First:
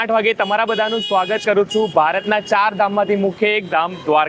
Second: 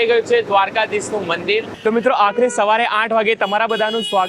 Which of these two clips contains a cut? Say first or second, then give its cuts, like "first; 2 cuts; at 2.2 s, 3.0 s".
second; 1 cut; at 1.7 s